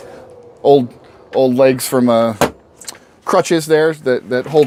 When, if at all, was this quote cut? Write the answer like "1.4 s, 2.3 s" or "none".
none